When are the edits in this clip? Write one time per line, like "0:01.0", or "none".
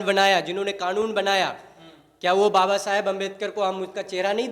none